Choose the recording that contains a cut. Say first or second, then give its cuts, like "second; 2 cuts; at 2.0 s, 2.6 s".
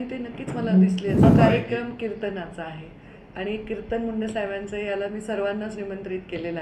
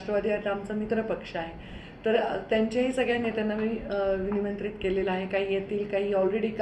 first; 1 cut; at 1.2 s